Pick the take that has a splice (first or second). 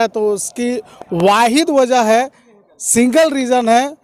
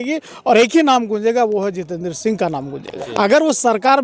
second